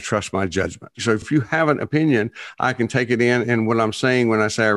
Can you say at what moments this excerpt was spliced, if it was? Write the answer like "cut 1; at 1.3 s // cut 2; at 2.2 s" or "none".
cut 1; at 1.3 s